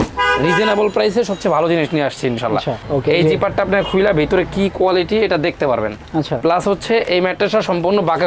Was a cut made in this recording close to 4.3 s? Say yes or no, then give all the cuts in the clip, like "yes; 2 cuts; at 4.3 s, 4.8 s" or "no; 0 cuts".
no; 1 cut; at 2.8 s